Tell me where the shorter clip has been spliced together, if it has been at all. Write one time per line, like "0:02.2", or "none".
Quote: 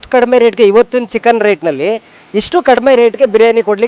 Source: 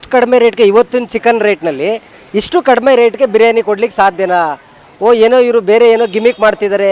none